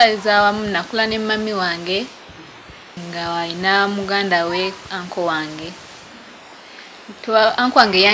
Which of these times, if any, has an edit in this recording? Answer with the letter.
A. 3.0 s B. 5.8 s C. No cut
A